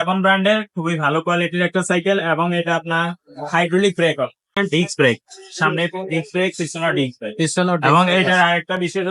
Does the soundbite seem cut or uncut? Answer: cut